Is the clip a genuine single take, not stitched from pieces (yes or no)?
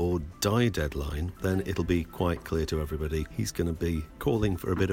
no